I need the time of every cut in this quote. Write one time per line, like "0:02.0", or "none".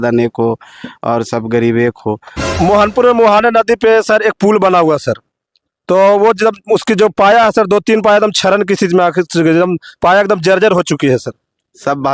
0:02.4